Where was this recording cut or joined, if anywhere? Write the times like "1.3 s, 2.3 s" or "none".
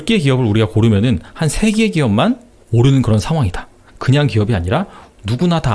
none